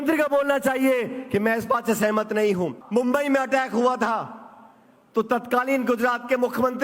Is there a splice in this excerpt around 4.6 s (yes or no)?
no